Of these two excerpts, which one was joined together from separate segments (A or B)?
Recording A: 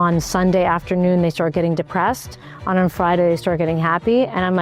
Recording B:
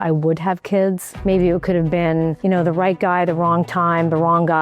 B